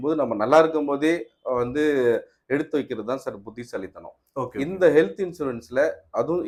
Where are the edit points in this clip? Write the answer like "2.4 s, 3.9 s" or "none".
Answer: none